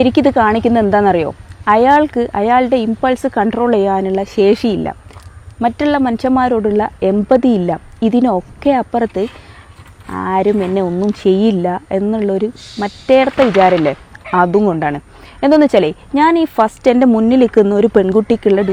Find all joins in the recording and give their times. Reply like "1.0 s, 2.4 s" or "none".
none